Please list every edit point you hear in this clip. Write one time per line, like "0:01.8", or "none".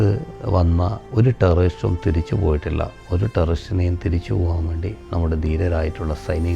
0:01.0